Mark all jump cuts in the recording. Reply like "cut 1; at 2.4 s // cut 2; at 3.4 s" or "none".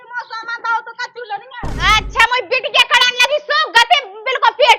cut 1; at 1.7 s